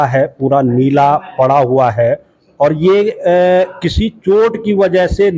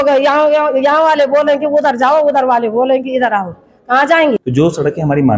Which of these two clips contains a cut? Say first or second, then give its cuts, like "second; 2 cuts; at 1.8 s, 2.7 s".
second; 1 cut; at 4.4 s